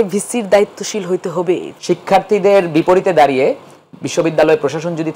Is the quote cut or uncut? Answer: cut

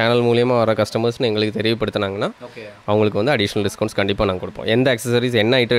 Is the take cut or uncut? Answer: uncut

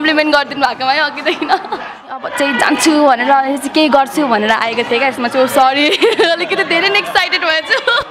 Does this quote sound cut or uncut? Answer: cut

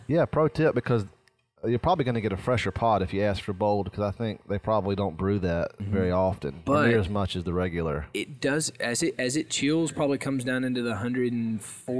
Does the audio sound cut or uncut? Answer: uncut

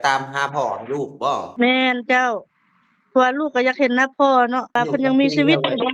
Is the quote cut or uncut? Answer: cut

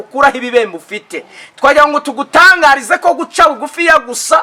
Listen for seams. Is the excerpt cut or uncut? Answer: uncut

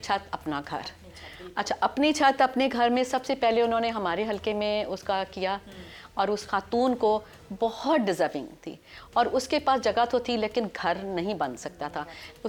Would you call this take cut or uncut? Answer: uncut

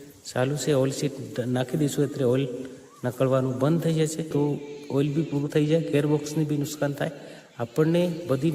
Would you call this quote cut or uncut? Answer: cut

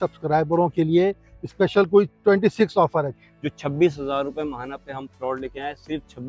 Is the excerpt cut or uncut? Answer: cut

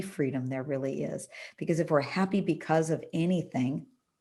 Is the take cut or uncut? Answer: uncut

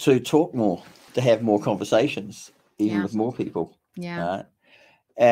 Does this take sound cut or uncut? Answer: cut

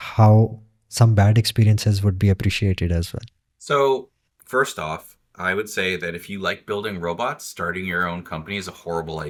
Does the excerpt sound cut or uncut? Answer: uncut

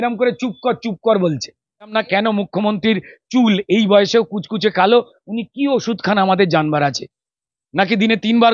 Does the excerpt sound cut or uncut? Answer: cut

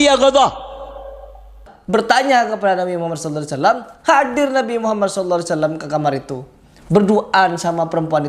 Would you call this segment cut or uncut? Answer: cut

